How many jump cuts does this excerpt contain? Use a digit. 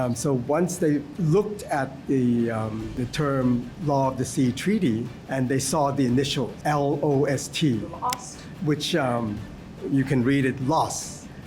4